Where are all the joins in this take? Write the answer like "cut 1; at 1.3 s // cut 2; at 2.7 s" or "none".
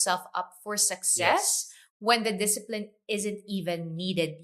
none